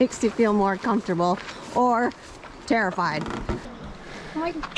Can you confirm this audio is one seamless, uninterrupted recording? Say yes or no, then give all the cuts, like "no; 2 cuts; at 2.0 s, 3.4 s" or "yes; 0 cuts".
no; 1 cut; at 3.7 s